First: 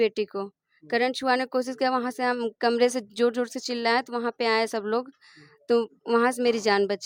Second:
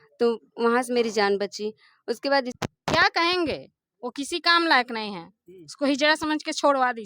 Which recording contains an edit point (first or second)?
second